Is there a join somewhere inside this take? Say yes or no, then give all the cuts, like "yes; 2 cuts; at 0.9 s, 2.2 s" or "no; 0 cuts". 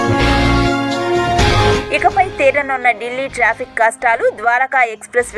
yes; 1 cut; at 1.3 s